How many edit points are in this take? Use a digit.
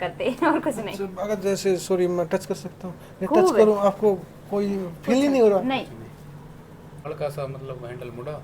1